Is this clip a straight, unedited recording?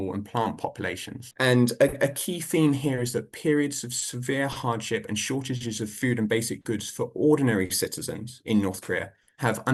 yes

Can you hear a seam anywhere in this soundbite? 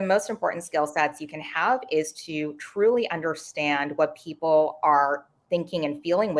no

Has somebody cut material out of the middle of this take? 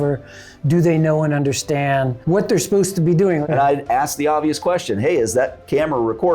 yes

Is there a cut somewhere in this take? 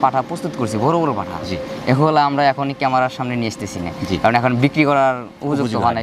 no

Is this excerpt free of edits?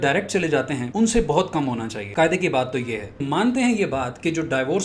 no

